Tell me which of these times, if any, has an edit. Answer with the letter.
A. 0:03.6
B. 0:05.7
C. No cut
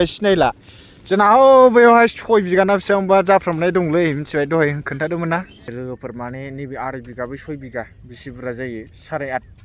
B